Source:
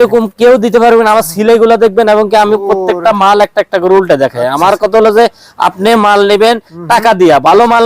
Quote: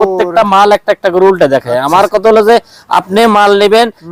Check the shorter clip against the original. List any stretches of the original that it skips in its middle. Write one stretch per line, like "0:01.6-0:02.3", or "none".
none